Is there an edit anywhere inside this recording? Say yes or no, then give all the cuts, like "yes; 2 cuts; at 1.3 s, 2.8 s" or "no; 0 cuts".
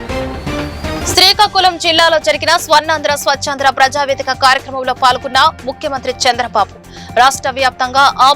yes; 1 cut; at 1.0 s